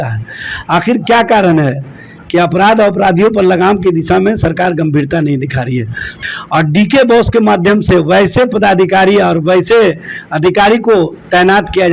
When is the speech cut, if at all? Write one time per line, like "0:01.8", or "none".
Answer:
0:06.1